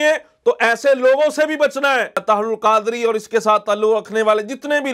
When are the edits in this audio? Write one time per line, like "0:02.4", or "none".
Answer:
0:02.2